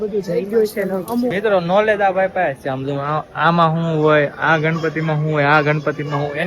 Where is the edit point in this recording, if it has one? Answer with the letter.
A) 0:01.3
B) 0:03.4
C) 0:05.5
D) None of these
A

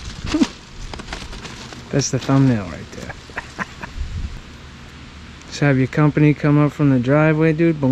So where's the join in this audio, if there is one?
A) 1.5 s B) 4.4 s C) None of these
B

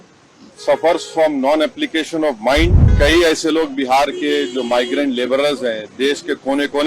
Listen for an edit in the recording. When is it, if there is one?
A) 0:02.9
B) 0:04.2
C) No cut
A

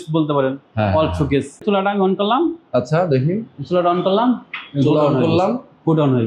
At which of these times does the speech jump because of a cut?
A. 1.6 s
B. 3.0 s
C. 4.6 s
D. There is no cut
A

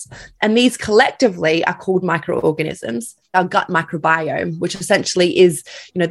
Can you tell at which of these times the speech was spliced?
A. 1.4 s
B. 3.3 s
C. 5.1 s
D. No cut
B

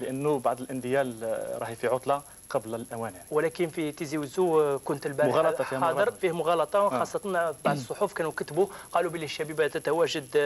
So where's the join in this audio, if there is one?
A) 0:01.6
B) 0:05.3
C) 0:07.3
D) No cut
A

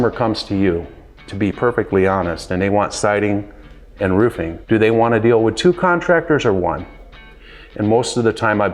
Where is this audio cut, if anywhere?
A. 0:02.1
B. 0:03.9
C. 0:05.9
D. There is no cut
D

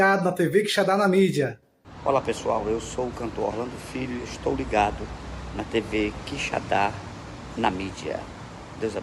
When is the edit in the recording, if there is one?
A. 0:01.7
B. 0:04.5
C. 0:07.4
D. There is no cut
D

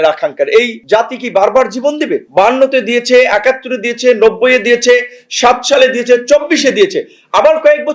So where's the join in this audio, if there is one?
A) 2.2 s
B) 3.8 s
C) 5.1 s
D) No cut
D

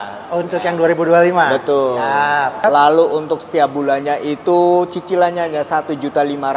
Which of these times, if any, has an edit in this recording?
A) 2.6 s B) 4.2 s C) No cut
A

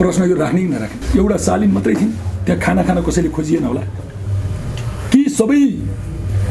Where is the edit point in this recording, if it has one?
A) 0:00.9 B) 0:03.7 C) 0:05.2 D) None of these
A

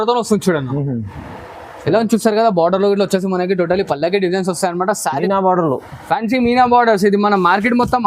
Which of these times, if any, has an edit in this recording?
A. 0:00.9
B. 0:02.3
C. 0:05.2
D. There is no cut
C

